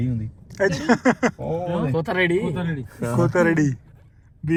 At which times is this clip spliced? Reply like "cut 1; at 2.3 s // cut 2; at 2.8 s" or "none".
none